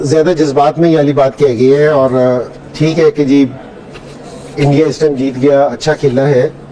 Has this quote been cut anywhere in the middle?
no; 0 cuts

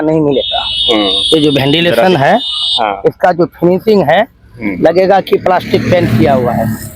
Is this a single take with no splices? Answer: yes; 0 cuts

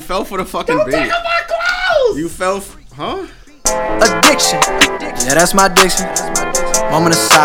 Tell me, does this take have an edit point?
yes; 1 cut; at 3.7 s

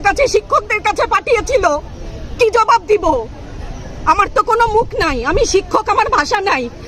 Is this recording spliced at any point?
no; 0 cuts

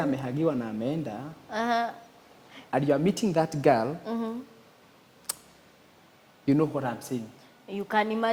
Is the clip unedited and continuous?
yes; 0 cuts

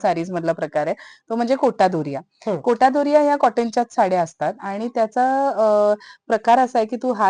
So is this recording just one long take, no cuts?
yes; 0 cuts

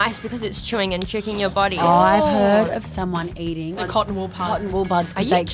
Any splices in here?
yes; 2 cuts; at 1.8 s, 3.8 s

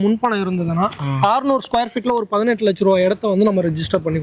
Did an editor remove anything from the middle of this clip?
no; 0 cuts

